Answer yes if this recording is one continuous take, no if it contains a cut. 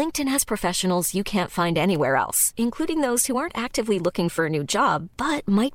yes